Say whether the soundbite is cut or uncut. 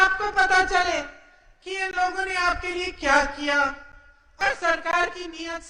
cut